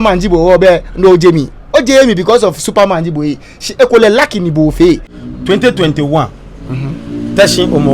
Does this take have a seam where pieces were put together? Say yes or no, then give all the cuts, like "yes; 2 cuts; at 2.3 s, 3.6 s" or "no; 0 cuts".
yes; 1 cut; at 5.0 s